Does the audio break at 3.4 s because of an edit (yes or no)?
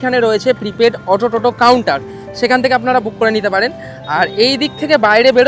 no